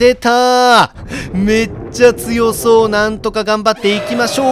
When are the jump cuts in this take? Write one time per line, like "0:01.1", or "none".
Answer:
none